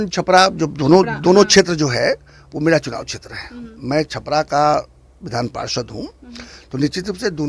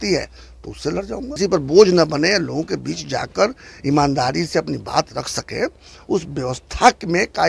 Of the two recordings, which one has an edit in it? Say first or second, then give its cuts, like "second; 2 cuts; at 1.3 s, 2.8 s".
second; 1 cut; at 1.3 s